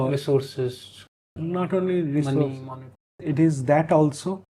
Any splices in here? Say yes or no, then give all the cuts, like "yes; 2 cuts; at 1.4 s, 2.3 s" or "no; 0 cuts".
yes; 1 cut; at 3.2 s